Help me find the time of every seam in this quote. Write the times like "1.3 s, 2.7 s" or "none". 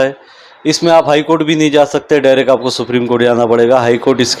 none